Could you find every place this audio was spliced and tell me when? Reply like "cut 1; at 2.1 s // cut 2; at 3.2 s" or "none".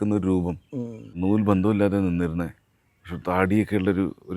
cut 1; at 1.1 s